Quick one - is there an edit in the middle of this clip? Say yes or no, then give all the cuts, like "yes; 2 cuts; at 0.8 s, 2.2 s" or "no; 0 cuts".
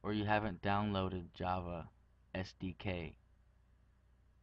yes; 1 cut; at 3.1 s